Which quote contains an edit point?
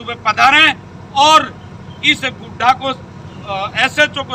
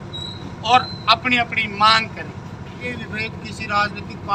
second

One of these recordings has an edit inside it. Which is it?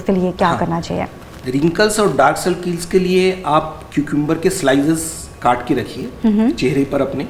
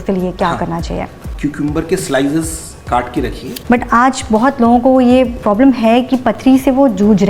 second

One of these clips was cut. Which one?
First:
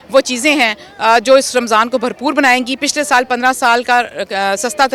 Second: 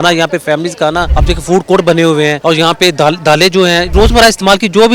second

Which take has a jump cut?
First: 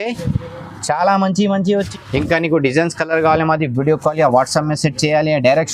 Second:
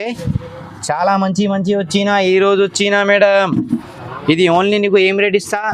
first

